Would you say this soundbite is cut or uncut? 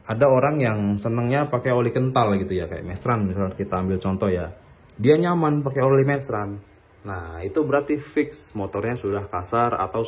uncut